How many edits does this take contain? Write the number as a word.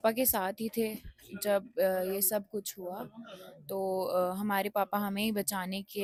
zero